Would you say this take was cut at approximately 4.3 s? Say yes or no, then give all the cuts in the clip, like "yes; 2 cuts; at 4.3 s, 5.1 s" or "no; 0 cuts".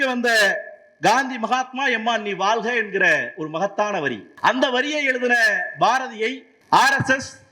yes; 2 cuts; at 4.3 s, 6.5 s